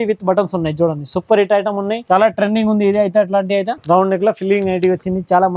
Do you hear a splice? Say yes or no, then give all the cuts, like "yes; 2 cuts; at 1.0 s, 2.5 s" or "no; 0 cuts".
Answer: yes; 2 cuts; at 2.0 s, 3.8 s